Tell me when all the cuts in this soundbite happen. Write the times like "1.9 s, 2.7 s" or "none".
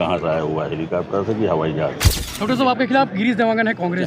2.2 s